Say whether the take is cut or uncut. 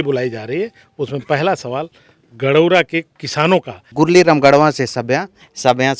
cut